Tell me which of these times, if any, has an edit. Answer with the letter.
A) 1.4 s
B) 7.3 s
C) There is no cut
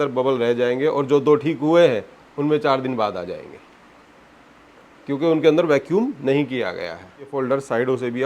B